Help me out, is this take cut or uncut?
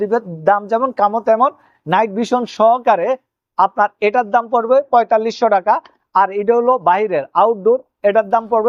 uncut